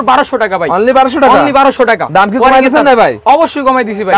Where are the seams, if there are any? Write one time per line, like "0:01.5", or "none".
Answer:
none

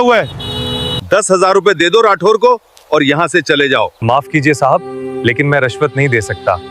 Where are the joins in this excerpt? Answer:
0:01.0
0:03.9

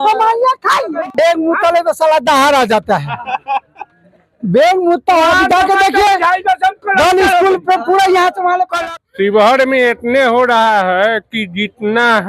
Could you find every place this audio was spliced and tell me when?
0:01.0
0:08.8

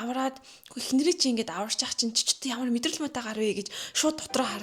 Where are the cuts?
none

